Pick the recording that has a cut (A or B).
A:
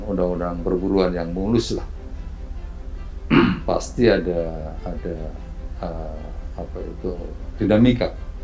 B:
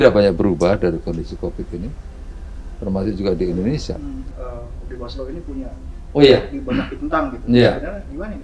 B